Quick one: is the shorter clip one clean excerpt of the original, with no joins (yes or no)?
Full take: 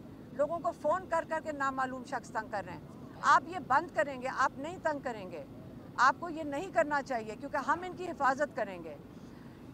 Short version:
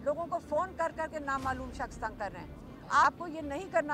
no